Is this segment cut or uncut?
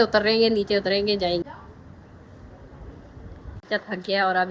cut